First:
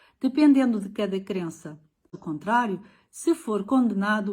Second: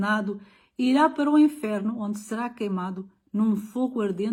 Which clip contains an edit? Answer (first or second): first